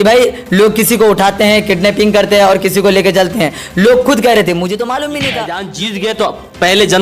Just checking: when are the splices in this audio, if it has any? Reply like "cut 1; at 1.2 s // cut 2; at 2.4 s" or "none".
cut 1; at 5.7 s